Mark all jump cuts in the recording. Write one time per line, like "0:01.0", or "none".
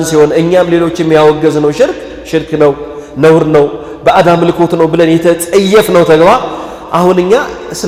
none